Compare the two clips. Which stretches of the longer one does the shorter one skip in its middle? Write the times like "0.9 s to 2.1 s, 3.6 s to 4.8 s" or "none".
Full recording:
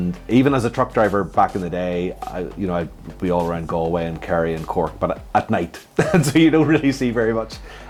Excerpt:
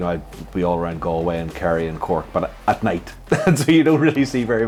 none